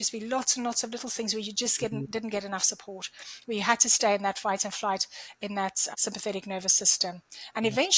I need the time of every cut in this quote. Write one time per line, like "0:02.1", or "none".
0:05.8